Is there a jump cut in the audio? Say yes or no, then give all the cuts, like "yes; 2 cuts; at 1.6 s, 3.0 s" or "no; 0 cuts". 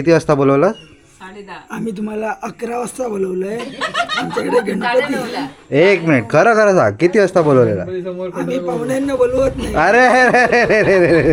no; 0 cuts